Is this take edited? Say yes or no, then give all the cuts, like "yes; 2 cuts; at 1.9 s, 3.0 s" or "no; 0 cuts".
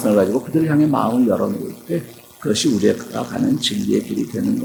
no; 0 cuts